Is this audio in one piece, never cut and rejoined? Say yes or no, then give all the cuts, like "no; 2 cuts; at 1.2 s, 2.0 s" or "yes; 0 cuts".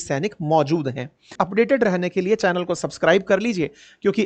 no; 1 cut; at 1.3 s